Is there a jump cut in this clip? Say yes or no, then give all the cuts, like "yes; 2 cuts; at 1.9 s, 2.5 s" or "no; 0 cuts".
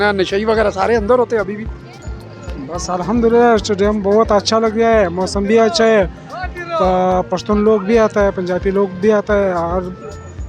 no; 0 cuts